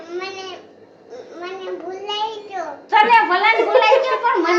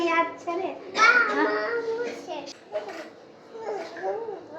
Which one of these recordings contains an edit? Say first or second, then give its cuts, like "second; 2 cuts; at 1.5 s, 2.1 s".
second; 1 cut; at 2.4 s